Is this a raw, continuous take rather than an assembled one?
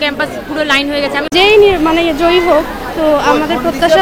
no; 1 cut; at 1.3 s

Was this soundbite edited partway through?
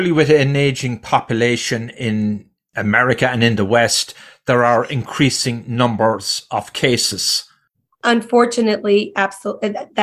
no; 0 cuts

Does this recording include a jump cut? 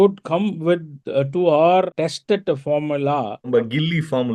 yes; 2 cuts; at 1.9 s, 3.5 s

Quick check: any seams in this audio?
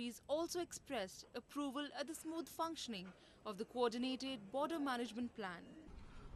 no; 0 cuts

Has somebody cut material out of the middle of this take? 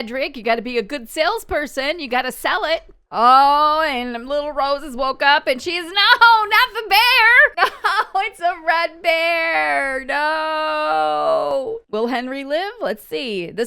yes; 2 cuts; at 3.0 s, 11.8 s

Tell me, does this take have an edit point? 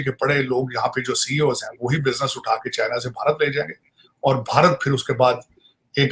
no; 0 cuts

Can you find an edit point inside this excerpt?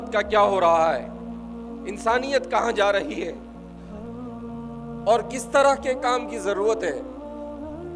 yes; 3 cuts; at 3.3 s, 4.7 s, 7.0 s

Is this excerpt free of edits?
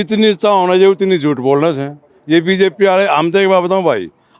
yes; 0 cuts

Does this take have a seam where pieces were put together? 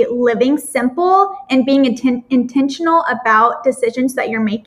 no; 0 cuts

